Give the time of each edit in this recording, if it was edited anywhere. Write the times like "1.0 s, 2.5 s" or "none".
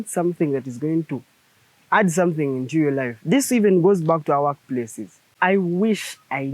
5.4 s